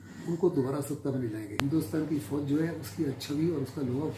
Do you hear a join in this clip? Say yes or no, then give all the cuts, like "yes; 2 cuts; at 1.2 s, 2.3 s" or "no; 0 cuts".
yes; 1 cut; at 1.5 s